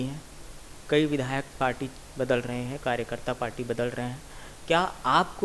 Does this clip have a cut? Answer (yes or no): no